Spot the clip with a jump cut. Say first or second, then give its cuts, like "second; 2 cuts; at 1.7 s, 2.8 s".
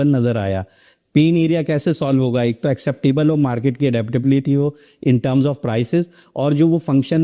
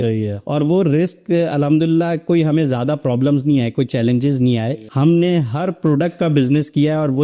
second; 1 cut; at 4.8 s